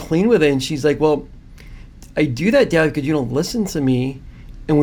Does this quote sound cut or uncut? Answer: uncut